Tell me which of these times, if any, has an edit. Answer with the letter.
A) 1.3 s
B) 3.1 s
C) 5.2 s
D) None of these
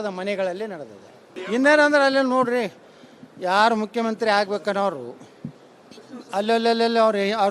A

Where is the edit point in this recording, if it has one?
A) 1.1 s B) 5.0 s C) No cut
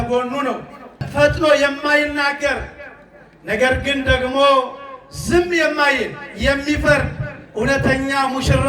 A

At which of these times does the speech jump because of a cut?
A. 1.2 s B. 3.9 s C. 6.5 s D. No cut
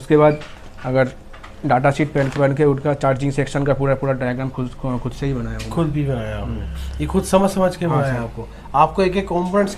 D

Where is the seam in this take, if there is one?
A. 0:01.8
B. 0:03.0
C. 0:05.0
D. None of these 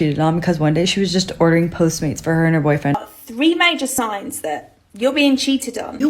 B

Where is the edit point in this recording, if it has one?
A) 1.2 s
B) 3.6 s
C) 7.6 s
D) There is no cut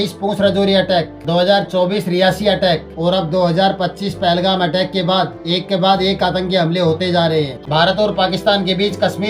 C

